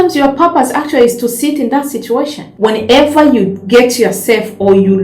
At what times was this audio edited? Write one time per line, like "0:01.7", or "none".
0:02.5